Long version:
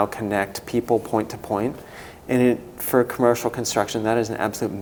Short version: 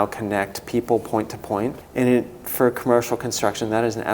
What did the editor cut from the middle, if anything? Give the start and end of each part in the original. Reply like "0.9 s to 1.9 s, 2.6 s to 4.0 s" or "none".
1.8 s to 2.2 s